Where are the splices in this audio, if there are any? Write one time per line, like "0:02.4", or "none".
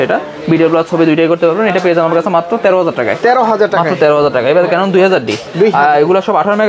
none

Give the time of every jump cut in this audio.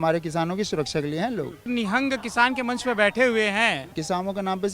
0:01.7
0:03.9

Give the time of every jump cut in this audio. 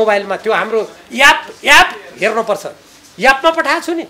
none

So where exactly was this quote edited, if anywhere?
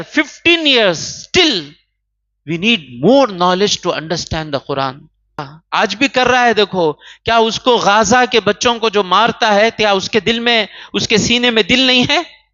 0:05.5

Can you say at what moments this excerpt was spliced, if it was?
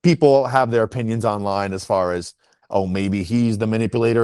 none

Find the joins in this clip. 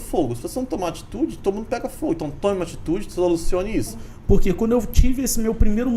0:04.1

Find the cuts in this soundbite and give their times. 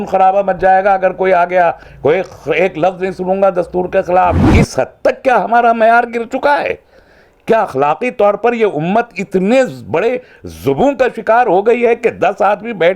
0:04.5

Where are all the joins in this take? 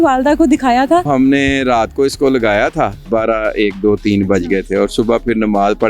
0:01.1
0:03.1

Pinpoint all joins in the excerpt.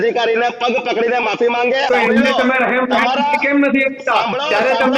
0:01.9

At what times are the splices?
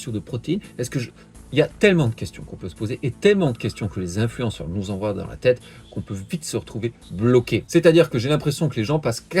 0:07.7

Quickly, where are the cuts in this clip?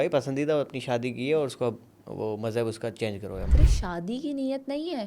0:03.4

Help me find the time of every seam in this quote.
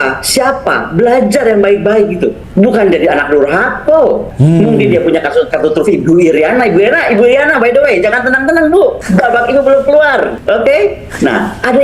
0:02.4
0:04.3
0:05.5
0:09.0
0:10.4

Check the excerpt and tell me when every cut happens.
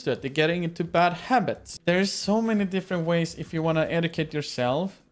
0:01.7

